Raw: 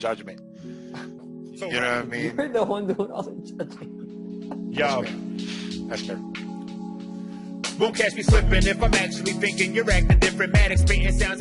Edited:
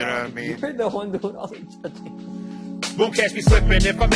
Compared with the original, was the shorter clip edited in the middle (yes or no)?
yes